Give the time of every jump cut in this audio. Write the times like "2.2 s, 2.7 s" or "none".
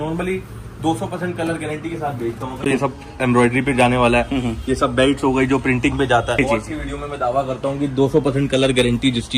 2.6 s, 6.4 s